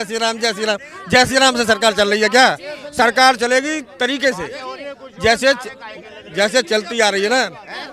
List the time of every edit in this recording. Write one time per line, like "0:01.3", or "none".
none